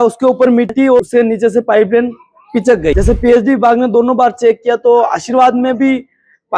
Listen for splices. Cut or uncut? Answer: cut